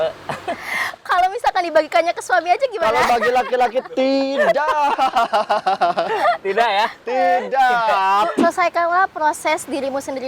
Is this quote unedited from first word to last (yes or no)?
no